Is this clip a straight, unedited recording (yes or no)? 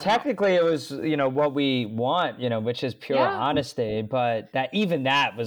yes